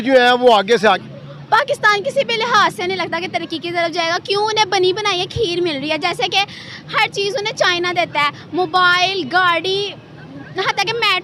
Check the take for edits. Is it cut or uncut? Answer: cut